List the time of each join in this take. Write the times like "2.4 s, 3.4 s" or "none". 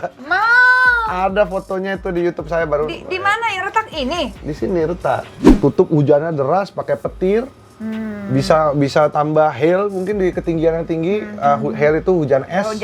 5.4 s